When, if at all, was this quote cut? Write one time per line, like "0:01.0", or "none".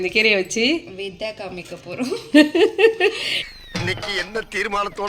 none